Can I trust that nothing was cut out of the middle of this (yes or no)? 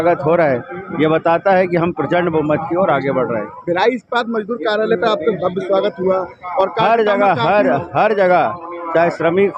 yes